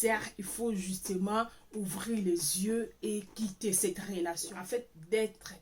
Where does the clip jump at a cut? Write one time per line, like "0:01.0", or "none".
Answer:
0:04.4

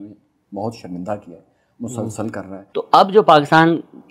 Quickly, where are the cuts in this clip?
0:02.5

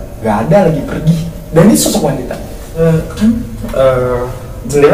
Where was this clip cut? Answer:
0:02.8

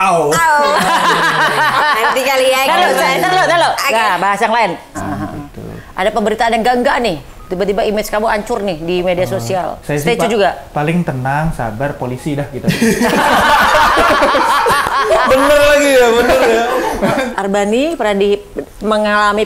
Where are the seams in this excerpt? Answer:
0:05.0
0:17.2

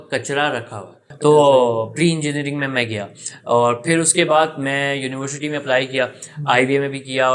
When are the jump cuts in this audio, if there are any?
0:01.1

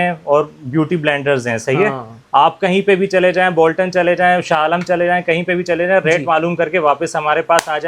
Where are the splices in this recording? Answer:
none

